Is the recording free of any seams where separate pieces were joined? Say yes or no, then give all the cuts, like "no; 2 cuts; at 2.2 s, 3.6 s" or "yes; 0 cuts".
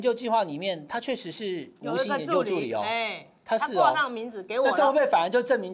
yes; 0 cuts